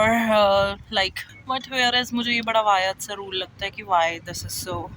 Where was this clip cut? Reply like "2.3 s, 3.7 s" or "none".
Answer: 1.3 s